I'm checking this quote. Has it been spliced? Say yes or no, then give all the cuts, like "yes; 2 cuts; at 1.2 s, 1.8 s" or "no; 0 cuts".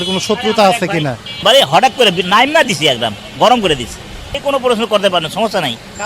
yes; 2 cuts; at 1.4 s, 4.3 s